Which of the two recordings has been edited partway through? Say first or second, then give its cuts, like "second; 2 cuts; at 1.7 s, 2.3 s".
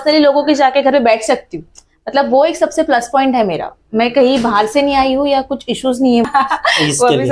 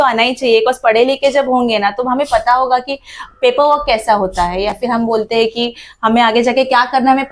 first; 1 cut; at 6.3 s